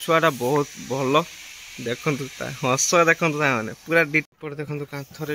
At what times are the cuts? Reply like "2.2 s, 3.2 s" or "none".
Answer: 4.3 s